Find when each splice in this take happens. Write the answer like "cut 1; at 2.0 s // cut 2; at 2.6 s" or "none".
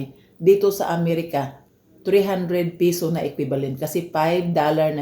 cut 1; at 1.6 s